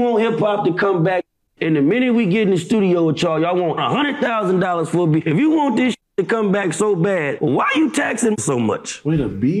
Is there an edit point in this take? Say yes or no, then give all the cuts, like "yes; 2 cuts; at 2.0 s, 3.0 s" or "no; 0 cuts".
no; 0 cuts